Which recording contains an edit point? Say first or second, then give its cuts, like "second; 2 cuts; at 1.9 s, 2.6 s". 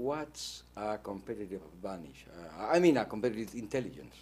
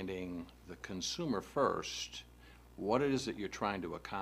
first; 1 cut; at 2.0 s